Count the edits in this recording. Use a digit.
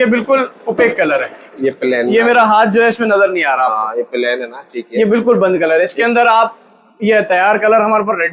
0